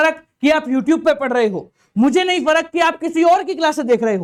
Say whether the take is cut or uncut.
uncut